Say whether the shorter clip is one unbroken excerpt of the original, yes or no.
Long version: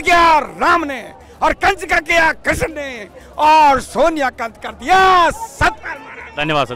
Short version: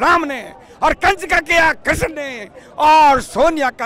yes